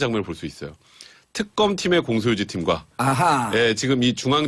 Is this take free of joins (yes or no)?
yes